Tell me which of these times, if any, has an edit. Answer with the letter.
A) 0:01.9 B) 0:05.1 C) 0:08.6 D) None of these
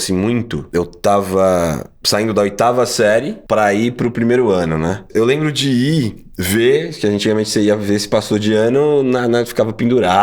B